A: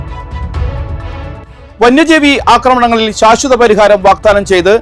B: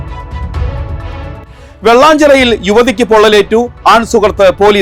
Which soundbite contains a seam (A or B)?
A